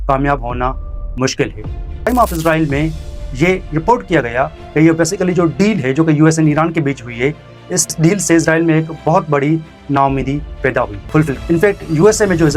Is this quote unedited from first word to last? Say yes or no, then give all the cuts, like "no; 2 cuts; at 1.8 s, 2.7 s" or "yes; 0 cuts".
no; 2 cuts; at 2.1 s, 11.0 s